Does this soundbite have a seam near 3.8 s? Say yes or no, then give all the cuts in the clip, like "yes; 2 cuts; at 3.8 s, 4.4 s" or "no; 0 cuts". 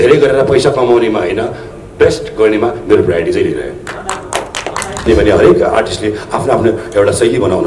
no; 1 cut; at 5.1 s